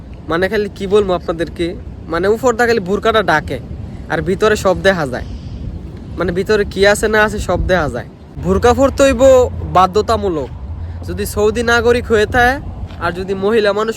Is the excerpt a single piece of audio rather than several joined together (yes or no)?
no